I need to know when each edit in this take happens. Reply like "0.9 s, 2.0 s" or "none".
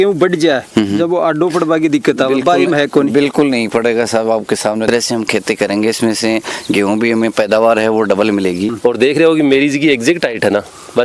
4.8 s, 8.7 s